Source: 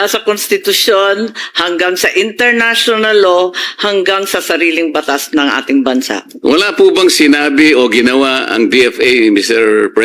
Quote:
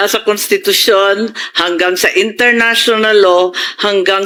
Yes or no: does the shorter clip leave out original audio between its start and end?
no